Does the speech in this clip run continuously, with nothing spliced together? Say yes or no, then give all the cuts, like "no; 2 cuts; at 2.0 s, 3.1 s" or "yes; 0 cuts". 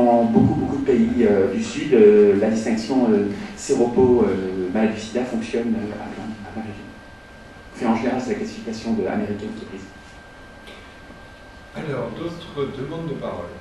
no; 1 cut; at 5.9 s